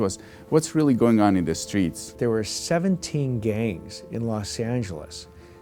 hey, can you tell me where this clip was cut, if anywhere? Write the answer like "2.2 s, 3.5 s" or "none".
2.1 s

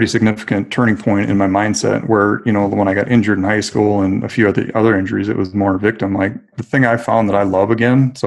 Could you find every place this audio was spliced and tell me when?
6.6 s

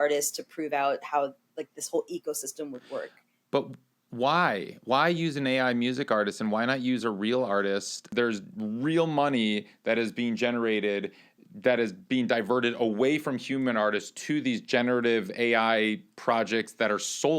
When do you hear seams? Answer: 8.1 s

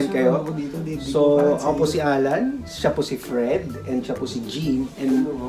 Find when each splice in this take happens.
none

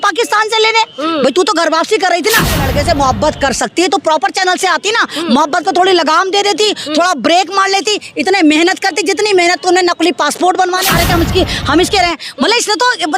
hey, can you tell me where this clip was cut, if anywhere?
2.6 s, 10.9 s

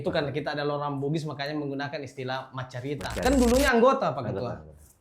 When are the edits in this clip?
3.1 s

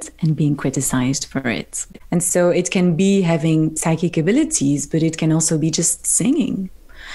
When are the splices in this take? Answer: 1.9 s

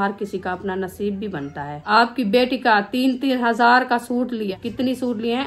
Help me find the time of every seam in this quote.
1.8 s, 4.6 s

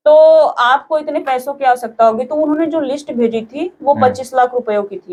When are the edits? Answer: none

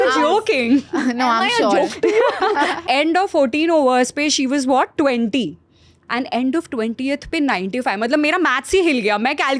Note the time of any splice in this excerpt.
2.8 s

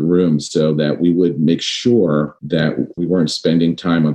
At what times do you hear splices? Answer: 2.9 s

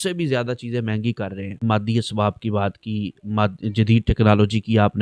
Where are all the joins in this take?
1.6 s

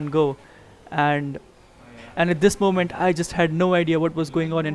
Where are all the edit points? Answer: 2.0 s

